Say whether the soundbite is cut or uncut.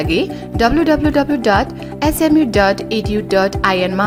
uncut